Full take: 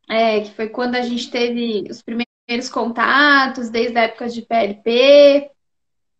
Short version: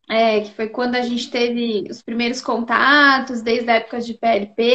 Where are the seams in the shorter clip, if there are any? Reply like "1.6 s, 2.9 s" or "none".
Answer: 2.2 s